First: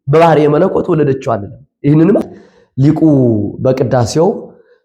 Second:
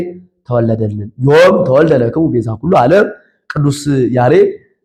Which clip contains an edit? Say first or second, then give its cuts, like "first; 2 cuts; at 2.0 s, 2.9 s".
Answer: first; 1 cut; at 2.2 s